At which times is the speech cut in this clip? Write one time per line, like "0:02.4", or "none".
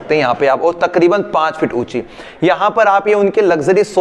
none

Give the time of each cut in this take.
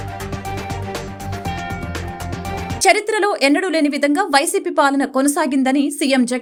none

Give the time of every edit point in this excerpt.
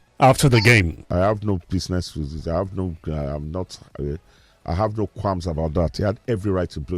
0:01.0

